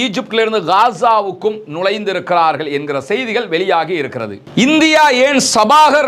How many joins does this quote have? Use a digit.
1